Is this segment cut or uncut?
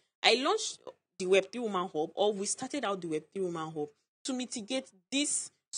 uncut